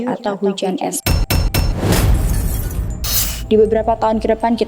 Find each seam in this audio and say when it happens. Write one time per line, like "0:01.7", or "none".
0:01.0
0:03.3